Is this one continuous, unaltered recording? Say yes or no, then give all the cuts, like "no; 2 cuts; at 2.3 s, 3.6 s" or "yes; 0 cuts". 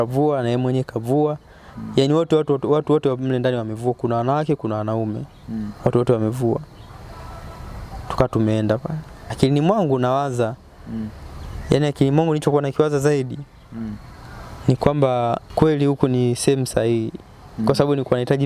no; 2 cuts; at 9.3 s, 15.5 s